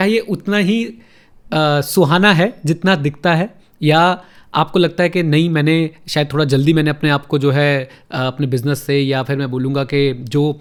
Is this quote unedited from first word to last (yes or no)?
yes